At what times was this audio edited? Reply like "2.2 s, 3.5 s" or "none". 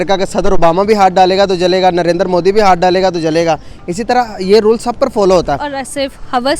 5.7 s